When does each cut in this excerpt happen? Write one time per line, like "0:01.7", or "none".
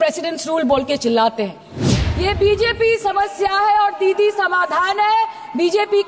0:01.8